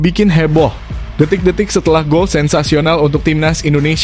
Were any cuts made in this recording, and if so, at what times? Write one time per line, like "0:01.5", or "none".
none